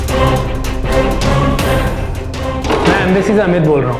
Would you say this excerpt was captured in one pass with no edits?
no; 1 cut; at 2.6 s

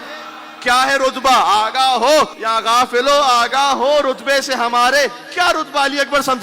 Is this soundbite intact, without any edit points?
no; 1 cut; at 2.4 s

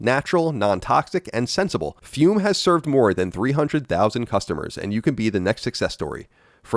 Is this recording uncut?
no; 1 cut; at 2.0 s

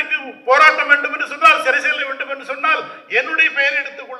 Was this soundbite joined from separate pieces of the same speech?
no; 0 cuts

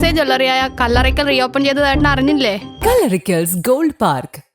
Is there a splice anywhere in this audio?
yes; 1 cut; at 2.7 s

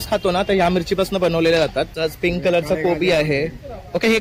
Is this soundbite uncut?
no; 1 cut; at 1.9 s

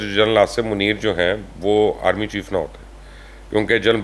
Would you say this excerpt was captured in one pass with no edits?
yes; 0 cuts

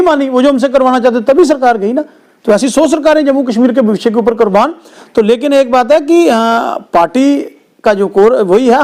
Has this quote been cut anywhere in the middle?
no; 0 cuts

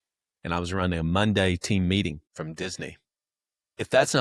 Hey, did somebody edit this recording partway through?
no; 0 cuts

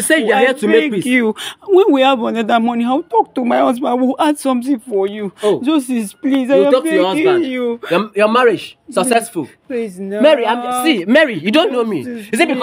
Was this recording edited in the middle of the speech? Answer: no; 0 cuts

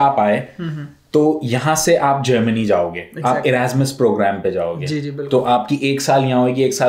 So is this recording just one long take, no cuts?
yes; 0 cuts

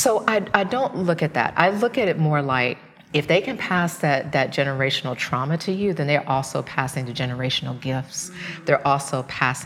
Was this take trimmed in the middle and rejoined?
yes; 1 cut; at 2.9 s

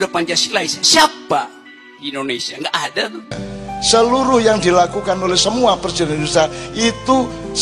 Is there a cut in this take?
yes; 1 cut; at 3.5 s

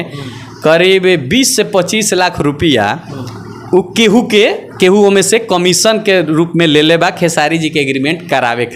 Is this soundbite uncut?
yes; 0 cuts

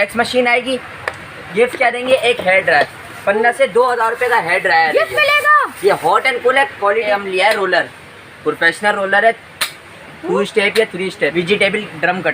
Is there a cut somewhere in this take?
yes; 3 cuts; at 1.4 s, 7.1 s, 11.3 s

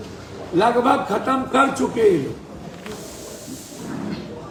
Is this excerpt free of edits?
yes; 0 cuts

